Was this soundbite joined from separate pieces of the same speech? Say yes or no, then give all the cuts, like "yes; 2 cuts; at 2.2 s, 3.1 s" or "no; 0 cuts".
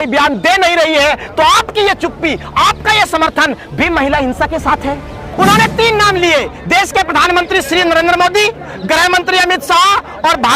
yes; 1 cut; at 5.3 s